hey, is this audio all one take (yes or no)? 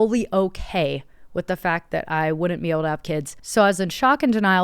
no